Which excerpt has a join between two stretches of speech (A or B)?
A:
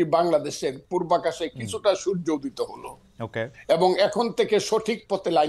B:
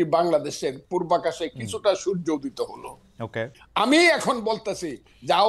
B